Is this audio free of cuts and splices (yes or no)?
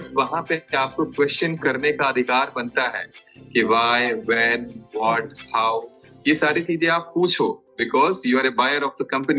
yes